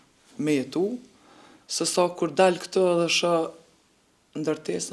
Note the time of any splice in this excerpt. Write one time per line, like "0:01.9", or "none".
none

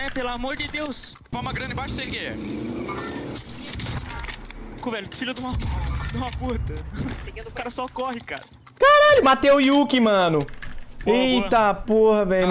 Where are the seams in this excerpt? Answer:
0:01.3

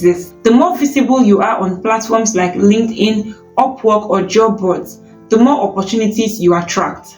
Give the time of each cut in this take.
none

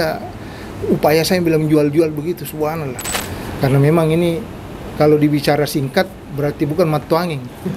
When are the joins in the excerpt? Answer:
0:03.2

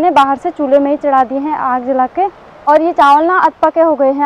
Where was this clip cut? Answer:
none

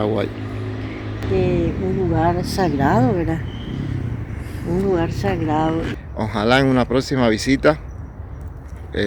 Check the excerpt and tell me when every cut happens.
0:01.2
0:05.9

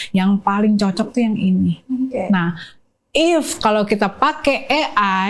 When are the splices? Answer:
none

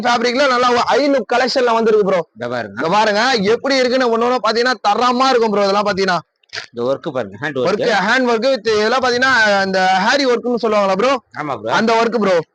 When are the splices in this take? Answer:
none

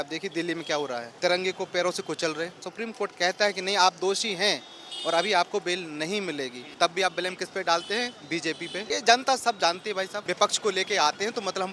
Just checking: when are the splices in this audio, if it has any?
0:01.1
0:02.7
0:06.6
0:08.9
0:10.2

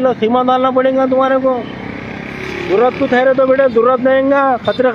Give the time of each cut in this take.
none

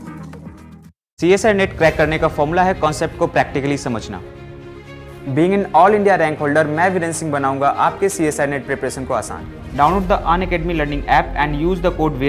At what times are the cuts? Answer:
0:01.1

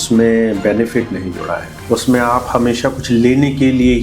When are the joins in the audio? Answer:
0:01.7

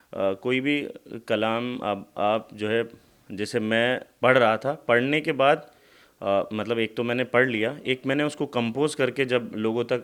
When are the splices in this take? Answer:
none

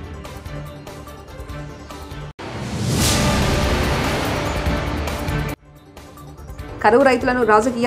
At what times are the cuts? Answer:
0:01.0
0:02.3
0:05.6

